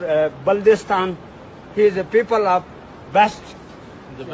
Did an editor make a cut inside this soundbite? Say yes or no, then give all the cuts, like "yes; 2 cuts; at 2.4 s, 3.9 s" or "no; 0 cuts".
no; 0 cuts